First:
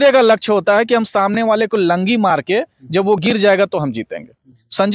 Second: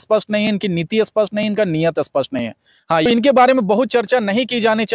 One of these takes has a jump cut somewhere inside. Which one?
second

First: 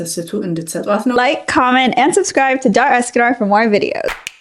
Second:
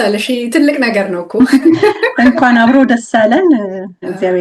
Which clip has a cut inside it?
first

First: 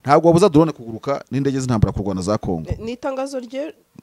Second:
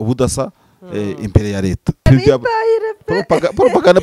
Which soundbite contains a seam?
second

